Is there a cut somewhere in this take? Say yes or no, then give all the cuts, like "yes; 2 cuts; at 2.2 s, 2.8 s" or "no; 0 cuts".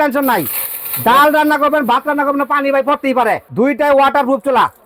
yes; 1 cut; at 3.5 s